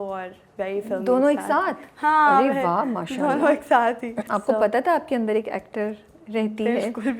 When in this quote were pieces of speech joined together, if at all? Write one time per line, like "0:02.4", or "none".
none